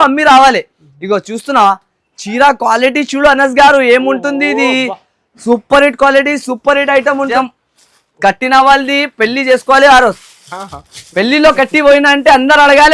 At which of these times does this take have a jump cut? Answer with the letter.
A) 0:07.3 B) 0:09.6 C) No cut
A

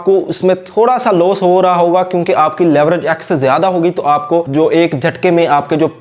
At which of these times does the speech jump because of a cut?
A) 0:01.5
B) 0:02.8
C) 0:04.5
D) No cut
C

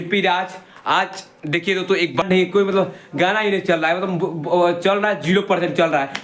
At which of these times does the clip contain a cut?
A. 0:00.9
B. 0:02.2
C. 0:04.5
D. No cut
B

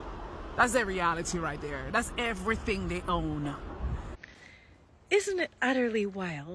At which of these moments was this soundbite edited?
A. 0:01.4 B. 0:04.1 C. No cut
B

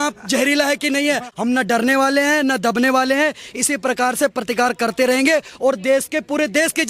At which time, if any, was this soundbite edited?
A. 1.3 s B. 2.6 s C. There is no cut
A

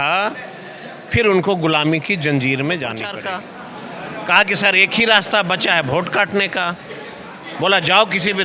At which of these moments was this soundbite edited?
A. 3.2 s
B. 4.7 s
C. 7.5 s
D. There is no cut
A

